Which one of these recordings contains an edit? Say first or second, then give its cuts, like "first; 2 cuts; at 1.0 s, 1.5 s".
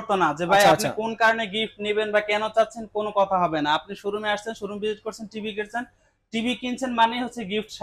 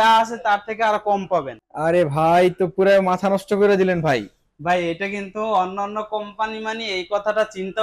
second; 1 cut; at 1.6 s